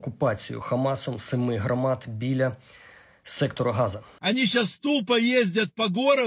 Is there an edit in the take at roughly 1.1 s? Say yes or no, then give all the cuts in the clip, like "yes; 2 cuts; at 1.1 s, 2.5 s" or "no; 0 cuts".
no; 1 cut; at 4.1 s